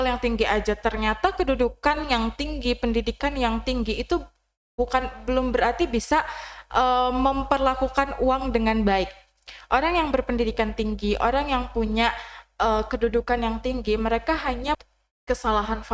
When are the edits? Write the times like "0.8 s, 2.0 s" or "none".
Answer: 14.7 s

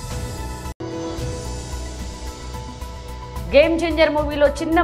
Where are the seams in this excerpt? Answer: 2.2 s, 3.5 s

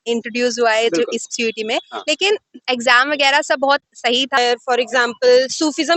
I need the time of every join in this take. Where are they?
4.4 s

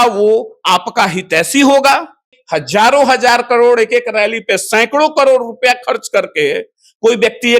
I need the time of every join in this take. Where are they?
2.4 s

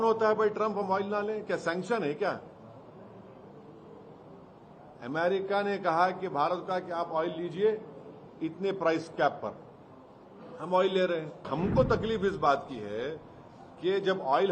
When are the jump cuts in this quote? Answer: 11.5 s

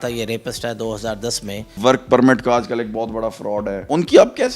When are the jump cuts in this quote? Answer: 1.7 s, 3.8 s

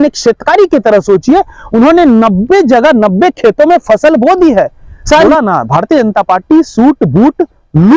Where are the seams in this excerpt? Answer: 5.3 s

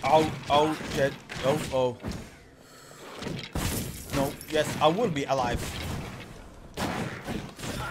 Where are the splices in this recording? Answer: 1.6 s

